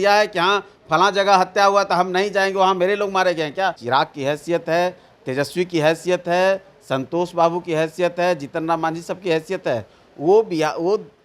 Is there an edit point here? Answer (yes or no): yes